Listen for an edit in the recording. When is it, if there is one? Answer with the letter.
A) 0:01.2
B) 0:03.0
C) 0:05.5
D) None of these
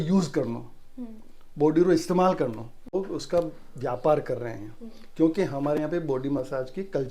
B